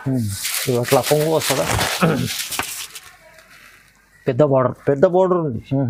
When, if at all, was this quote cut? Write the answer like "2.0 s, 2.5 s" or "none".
none